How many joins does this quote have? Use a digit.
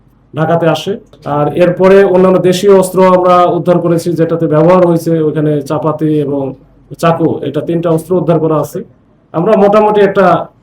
1